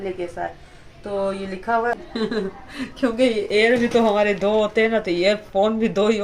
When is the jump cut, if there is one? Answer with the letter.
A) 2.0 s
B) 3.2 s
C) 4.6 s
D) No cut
A